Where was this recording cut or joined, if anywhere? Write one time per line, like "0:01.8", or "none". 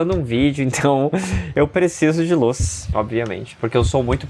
0:02.7